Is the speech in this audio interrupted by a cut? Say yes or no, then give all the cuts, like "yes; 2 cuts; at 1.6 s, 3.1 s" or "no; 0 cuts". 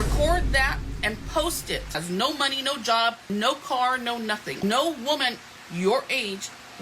yes; 3 cuts; at 2.0 s, 3.2 s, 4.6 s